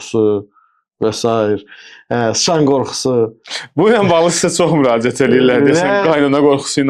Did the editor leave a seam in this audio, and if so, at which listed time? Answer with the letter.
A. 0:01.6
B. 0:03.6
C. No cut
C